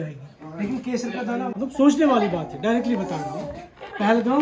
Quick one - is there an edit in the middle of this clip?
yes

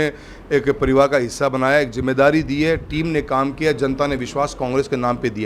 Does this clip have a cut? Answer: no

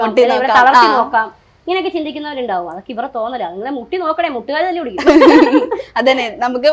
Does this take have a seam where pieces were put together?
no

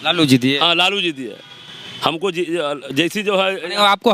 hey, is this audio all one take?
yes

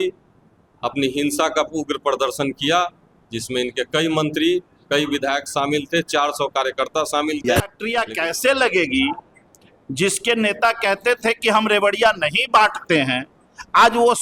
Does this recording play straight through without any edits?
no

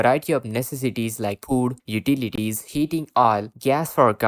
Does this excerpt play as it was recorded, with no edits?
yes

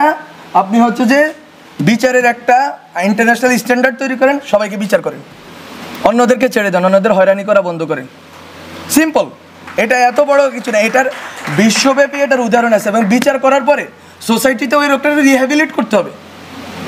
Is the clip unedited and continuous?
yes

